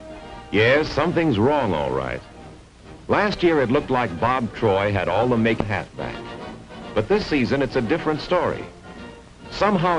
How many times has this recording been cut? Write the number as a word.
one